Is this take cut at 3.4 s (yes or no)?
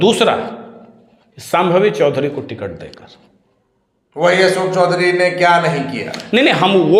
no